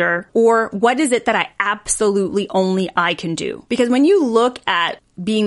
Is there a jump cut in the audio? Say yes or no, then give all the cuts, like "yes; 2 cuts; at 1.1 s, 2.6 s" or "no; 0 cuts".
no; 0 cuts